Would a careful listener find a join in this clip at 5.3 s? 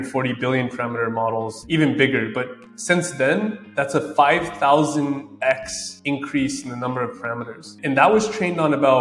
no; 1 cut; at 1.6 s

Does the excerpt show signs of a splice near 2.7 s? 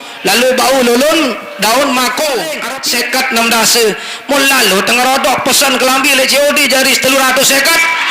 yes; 1 cut; at 2.7 s

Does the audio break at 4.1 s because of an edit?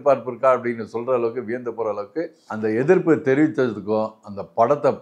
no; 1 cut; at 2.3 s

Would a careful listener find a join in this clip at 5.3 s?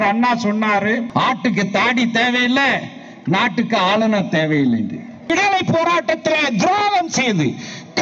yes; 2 cuts; at 1.1 s, 5.3 s

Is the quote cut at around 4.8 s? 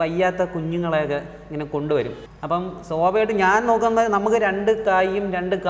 no; 1 cut; at 2.3 s

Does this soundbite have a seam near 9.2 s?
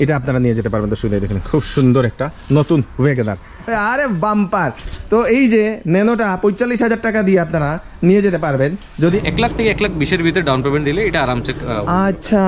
yes; 2 cuts; at 3.7 s, 9.2 s

